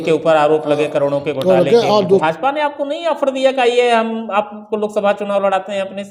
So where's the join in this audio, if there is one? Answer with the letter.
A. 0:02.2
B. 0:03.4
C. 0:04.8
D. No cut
A